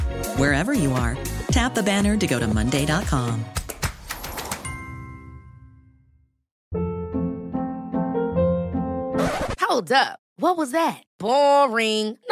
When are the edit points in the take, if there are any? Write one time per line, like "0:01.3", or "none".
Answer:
none

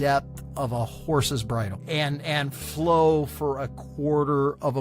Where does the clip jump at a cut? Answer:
0:01.8

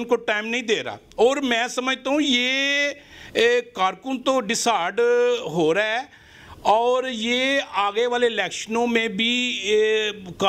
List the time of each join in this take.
none

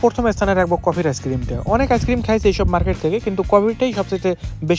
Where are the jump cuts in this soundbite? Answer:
none

